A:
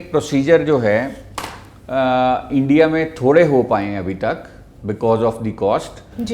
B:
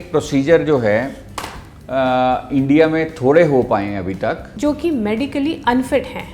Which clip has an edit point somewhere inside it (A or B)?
B